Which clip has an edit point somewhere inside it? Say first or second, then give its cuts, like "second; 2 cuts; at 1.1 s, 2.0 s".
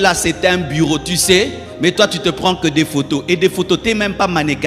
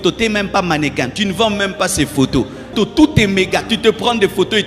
second; 1 cut; at 2.7 s